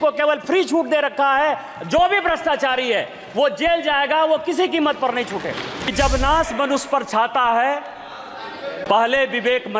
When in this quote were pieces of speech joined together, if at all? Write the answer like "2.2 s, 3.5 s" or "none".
5.9 s